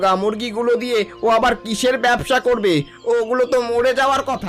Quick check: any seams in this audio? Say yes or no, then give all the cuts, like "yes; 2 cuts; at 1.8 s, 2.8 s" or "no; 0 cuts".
no; 0 cuts